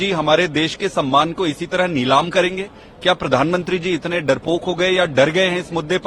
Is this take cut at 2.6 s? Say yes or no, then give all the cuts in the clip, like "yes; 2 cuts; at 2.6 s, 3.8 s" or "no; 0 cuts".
no; 0 cuts